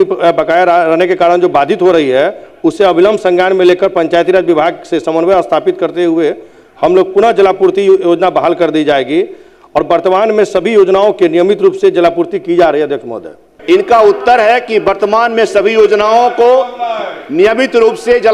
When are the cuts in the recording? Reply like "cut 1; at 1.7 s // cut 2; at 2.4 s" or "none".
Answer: cut 1; at 13.5 s